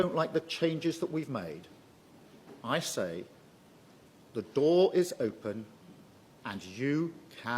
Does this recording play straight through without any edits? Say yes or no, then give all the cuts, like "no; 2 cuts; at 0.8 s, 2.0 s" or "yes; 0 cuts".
yes; 0 cuts